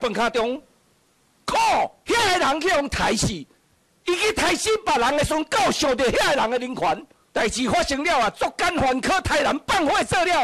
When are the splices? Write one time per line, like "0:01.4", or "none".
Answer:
0:02.0
0:07.2